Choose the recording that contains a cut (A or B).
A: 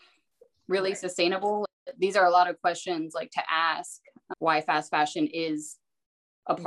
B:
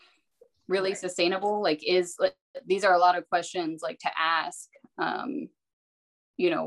A